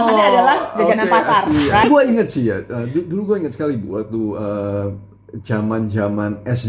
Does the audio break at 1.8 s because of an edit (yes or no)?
yes